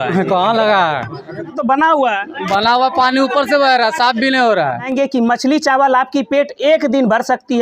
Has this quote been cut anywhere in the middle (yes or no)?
yes